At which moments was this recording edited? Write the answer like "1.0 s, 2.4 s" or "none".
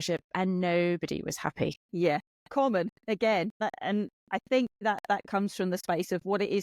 1.8 s, 3.6 s, 4.8 s